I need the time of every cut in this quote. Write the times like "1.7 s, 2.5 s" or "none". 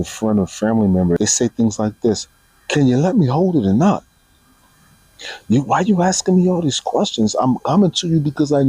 1.2 s